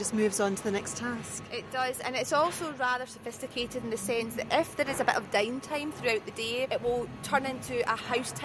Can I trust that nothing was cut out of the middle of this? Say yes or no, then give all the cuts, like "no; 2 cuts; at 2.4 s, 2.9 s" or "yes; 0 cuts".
no; 1 cut; at 6.7 s